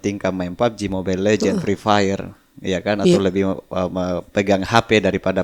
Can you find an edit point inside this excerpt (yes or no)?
no